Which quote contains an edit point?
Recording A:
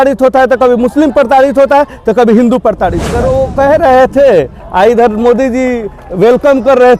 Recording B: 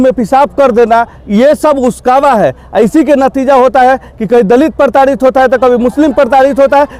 A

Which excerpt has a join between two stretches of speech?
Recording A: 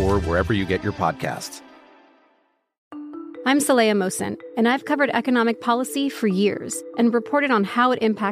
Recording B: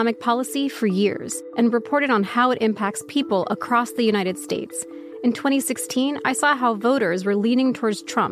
A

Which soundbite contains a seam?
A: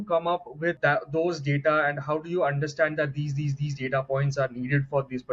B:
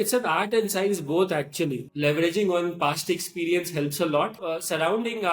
B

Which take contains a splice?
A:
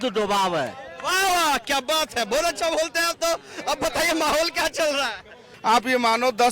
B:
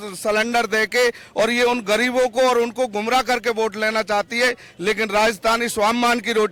A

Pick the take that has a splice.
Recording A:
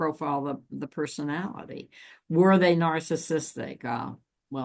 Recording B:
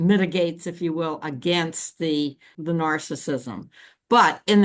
B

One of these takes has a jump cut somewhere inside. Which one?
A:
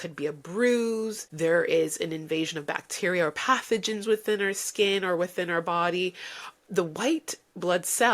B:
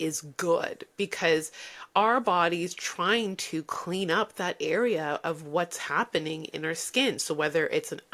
A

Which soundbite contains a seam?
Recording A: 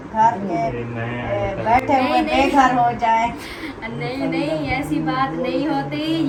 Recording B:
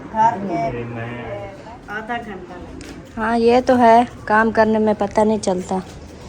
B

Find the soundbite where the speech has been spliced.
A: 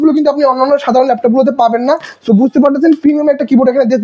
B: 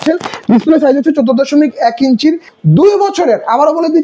B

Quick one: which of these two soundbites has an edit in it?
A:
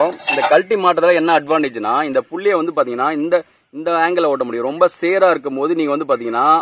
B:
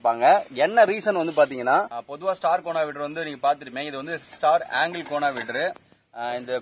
B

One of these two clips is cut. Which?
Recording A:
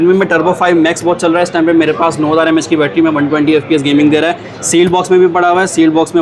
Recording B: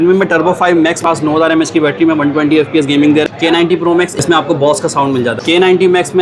B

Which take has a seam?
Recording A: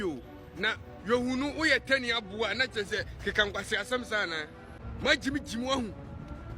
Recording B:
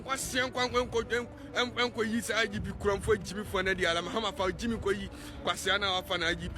A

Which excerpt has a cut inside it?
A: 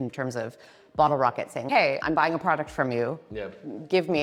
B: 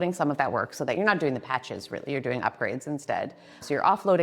B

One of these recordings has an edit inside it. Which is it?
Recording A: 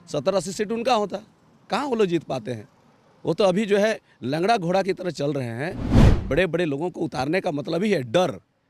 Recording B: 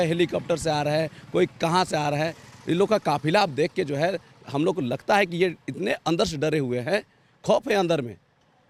A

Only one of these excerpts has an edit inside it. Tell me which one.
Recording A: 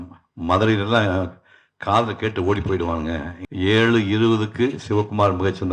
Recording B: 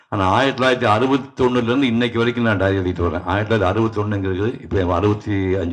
A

